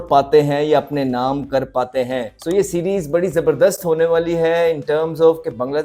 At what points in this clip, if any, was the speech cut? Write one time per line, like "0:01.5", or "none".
0:02.3